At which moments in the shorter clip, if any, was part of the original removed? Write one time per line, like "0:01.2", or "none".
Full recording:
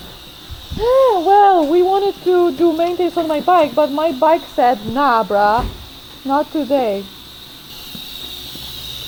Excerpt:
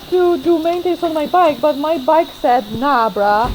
none